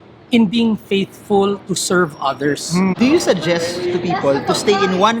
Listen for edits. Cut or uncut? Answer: cut